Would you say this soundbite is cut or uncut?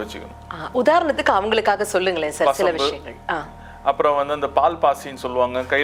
uncut